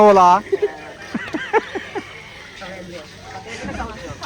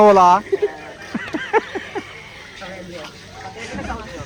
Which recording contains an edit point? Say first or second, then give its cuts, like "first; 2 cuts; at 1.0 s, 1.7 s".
first; 1 cut; at 3.1 s